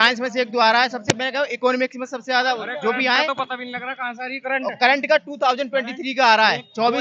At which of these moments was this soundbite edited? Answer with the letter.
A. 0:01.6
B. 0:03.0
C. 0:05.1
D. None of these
D